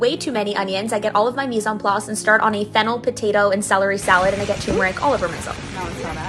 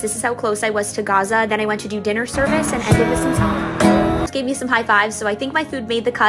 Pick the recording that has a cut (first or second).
second